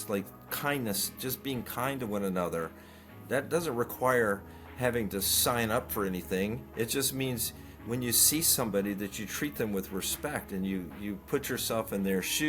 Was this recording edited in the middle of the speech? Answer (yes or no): no